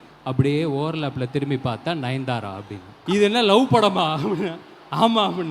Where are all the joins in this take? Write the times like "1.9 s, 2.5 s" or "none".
2.9 s